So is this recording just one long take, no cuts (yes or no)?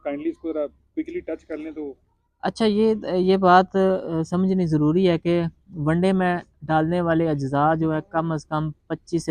yes